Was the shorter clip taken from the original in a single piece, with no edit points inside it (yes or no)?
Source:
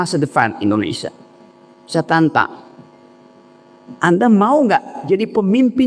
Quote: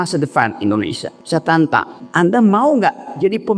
no